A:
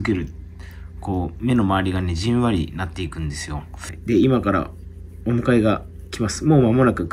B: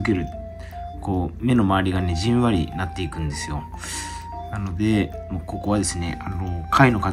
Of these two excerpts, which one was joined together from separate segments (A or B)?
A